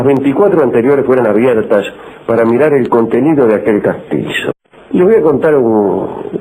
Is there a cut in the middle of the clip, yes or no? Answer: no